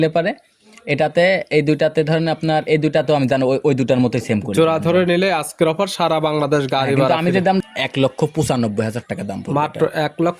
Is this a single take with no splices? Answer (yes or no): no